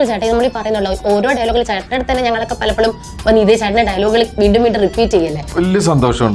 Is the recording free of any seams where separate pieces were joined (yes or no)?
no